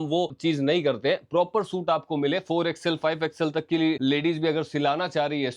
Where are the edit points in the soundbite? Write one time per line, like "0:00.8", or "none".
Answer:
0:04.0